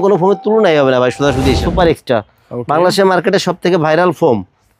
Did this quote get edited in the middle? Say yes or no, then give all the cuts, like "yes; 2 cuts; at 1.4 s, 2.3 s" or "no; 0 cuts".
yes; 1 cut; at 1.6 s